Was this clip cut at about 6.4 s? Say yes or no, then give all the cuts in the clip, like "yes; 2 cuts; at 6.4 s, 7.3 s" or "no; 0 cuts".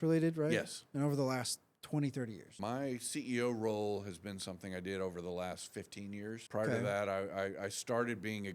yes; 2 cuts; at 2.5 s, 6.4 s